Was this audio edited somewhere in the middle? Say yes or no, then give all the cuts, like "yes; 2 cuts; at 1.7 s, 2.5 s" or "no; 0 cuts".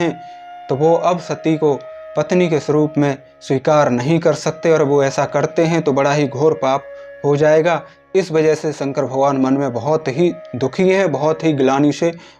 no; 0 cuts